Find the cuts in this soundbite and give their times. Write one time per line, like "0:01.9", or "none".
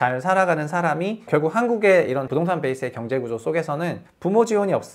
0:01.3
0:02.3
0:04.1